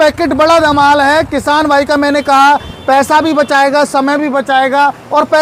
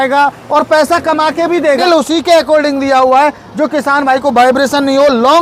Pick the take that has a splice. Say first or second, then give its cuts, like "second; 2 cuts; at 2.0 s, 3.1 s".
second; 1 cut; at 1.8 s